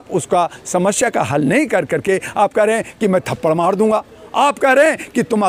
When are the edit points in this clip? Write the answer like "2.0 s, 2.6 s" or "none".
none